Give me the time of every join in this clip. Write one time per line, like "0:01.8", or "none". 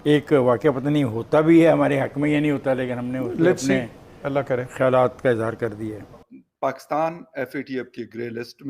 0:06.1